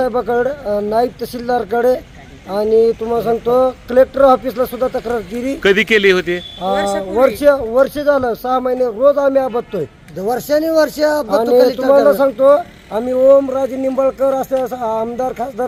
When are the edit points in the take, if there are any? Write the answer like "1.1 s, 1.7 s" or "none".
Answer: none